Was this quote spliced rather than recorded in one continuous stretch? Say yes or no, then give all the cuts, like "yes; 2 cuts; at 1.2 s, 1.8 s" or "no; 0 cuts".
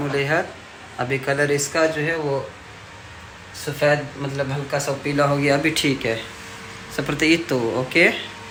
no; 0 cuts